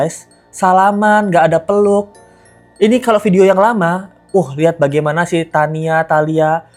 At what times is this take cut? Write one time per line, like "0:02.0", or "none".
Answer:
none